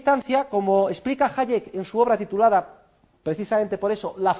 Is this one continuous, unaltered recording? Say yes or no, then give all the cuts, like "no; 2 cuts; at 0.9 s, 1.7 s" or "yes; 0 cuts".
no; 1 cut; at 2.2 s